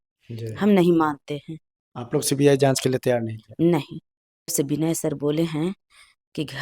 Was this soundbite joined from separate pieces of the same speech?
yes; 1 cut; at 4.5 s

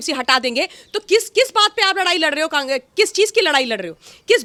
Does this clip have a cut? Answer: no; 0 cuts

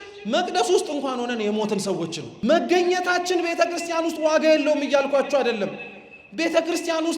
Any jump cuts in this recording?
yes; 1 cut; at 2.2 s

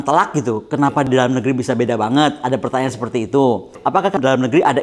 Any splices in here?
yes; 2 cuts; at 1.1 s, 4.0 s

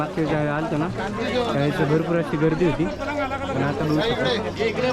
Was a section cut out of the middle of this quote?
no; 0 cuts

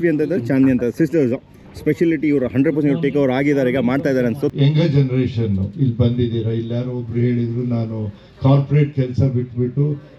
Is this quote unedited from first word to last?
no; 1 cut; at 4.5 s

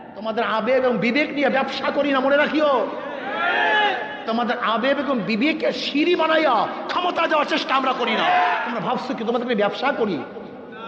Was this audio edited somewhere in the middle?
yes; 1 cut; at 8.6 s

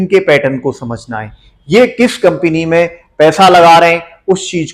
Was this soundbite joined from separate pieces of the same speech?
no; 0 cuts

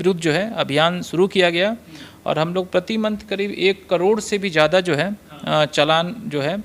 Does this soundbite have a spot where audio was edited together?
no; 0 cuts

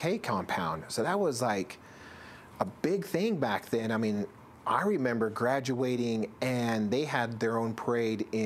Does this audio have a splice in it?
no; 0 cuts

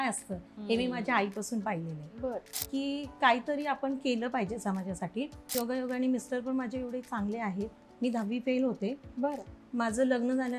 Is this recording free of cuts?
no; 2 cuts; at 2.5 s, 5.5 s

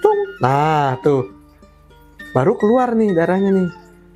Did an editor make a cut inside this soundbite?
no; 0 cuts

